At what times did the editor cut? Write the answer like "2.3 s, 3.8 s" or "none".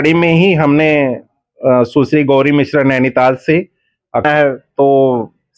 4.2 s